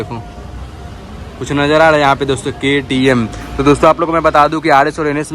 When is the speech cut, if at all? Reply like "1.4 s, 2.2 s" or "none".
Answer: none